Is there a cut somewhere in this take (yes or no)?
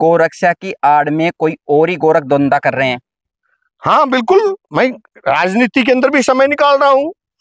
no